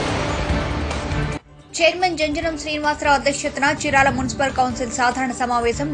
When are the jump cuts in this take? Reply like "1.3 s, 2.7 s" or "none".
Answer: 1.0 s